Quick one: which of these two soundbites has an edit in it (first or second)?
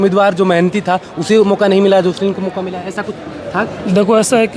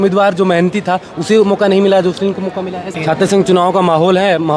second